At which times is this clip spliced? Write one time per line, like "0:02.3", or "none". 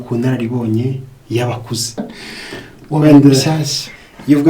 0:02.0